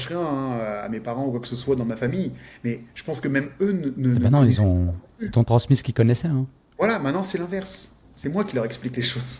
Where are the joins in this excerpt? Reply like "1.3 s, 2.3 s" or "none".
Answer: none